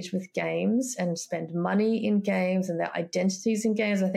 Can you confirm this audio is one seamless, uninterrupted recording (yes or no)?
yes